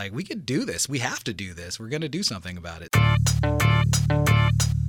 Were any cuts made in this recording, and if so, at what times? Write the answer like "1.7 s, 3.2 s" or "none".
2.8 s